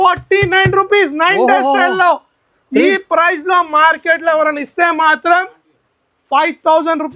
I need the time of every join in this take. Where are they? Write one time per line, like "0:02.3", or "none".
none